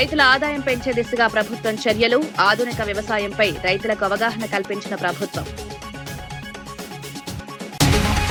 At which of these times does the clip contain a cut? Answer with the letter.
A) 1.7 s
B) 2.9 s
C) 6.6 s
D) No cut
D